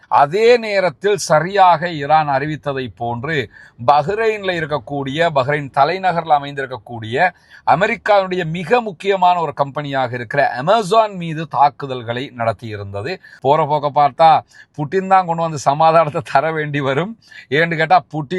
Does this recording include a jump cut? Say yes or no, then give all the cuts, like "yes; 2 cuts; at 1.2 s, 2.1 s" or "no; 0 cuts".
yes; 1 cut; at 13.3 s